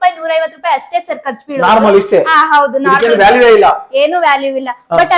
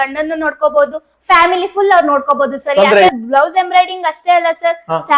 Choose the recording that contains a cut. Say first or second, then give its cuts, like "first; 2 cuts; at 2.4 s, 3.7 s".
second; 1 cut; at 3.1 s